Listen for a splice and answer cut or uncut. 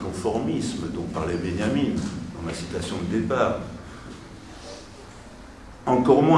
cut